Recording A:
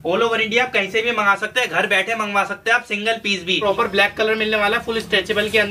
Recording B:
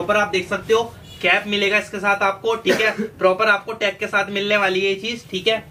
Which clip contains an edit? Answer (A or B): A